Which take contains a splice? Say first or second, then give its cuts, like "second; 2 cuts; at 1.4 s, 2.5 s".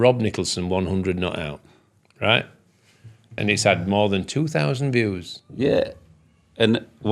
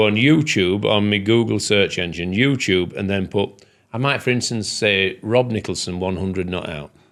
first; 1 cut; at 3.4 s